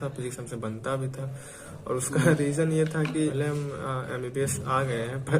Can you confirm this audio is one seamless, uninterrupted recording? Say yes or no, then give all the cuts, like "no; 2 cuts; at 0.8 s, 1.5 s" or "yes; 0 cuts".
no; 1 cut; at 3.3 s